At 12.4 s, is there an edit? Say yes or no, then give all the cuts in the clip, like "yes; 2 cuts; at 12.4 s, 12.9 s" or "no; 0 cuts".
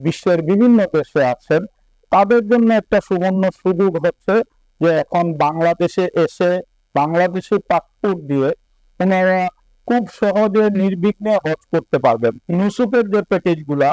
yes; 1 cut; at 12.4 s